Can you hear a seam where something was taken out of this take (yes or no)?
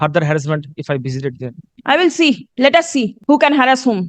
yes